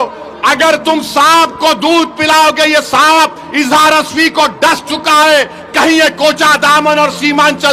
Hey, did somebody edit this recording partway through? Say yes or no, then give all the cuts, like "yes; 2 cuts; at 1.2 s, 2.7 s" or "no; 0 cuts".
no; 0 cuts